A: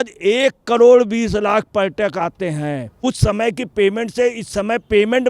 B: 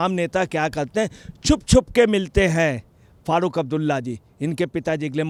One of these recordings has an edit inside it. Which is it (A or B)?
A